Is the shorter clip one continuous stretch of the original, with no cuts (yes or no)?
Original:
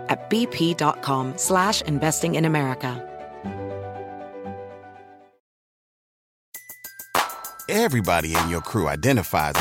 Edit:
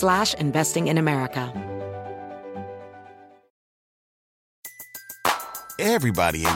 no